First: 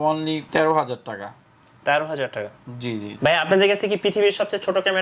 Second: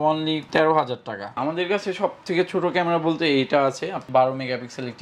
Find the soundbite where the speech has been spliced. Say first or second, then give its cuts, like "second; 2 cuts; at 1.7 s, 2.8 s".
second; 2 cuts; at 1.4 s, 4.0 s